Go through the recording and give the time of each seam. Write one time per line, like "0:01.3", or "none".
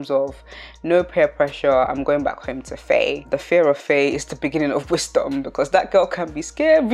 none